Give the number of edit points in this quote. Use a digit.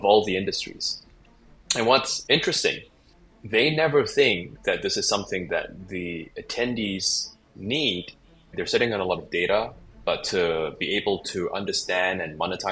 1